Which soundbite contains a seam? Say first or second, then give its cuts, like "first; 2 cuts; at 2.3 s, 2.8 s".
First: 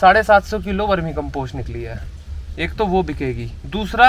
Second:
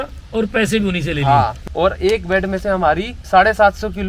second; 1 cut; at 1.7 s